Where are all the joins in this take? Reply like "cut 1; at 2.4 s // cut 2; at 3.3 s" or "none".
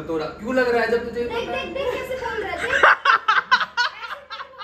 none